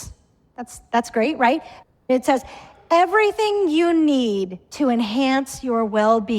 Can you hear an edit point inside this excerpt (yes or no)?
yes